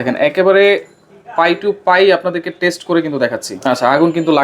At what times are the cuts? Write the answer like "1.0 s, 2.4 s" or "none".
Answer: 3.5 s